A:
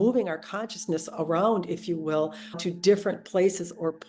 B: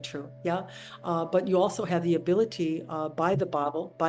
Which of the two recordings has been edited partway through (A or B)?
A